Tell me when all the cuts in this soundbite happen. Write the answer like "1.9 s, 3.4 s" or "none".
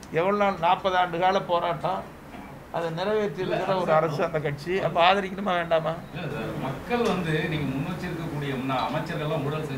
none

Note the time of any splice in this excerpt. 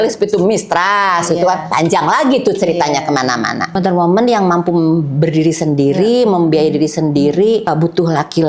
3.7 s

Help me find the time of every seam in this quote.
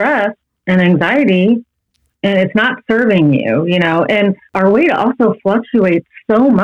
4.5 s

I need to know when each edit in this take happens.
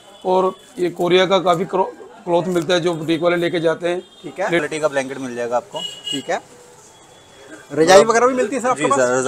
4.6 s

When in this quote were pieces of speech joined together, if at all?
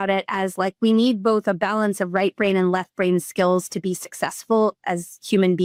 none

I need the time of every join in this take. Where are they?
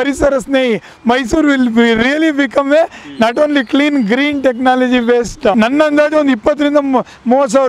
5.5 s

